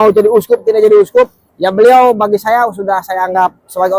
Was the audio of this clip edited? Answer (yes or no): yes